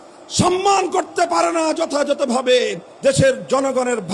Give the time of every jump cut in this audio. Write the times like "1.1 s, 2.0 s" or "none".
2.8 s